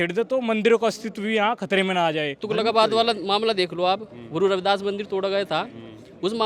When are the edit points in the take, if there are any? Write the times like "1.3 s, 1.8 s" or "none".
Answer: 2.4 s